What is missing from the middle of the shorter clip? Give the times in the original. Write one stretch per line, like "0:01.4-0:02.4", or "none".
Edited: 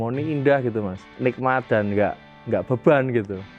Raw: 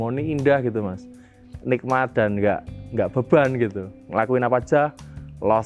0:01.0-0:01.5